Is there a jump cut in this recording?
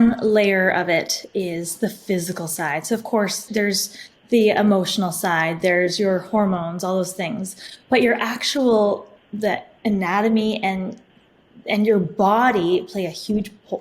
yes; 1 cut; at 3.4 s

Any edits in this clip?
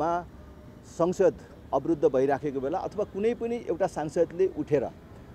no; 0 cuts

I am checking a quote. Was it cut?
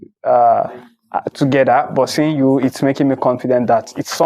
no; 0 cuts

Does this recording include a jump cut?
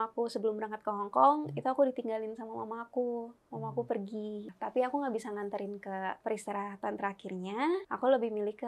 yes; 3 cuts; at 4.5 s, 6.2 s, 7.9 s

